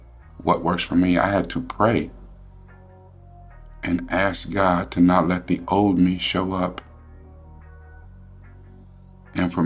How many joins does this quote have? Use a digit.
0